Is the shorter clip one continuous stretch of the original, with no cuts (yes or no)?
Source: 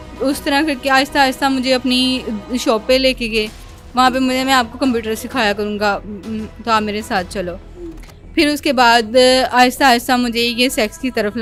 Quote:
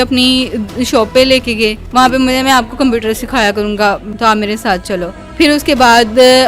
no